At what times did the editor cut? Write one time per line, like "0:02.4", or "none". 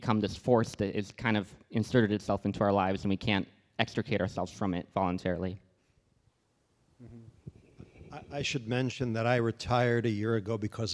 none